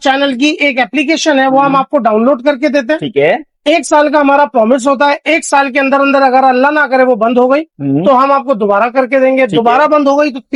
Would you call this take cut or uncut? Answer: uncut